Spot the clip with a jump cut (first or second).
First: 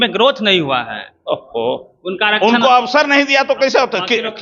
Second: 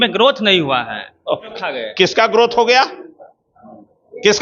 second